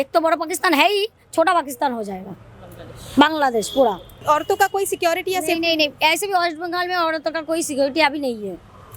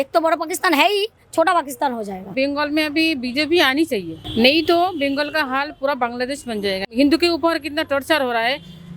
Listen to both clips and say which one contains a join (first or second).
second